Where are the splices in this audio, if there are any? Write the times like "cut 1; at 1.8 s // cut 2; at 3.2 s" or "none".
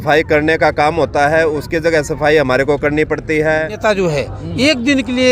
cut 1; at 3.7 s